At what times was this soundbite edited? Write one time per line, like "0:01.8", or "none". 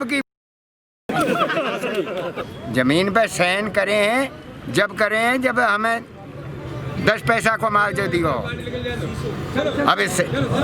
0:02.4